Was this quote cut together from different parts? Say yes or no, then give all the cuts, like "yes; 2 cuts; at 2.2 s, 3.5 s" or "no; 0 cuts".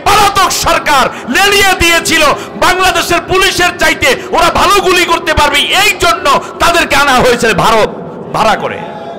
no; 0 cuts